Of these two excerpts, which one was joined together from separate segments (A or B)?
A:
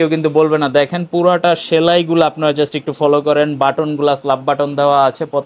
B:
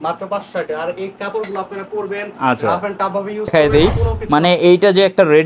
B